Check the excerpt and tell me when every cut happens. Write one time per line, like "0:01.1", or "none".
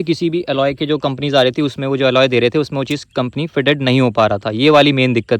none